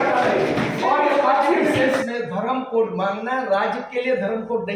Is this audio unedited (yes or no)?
no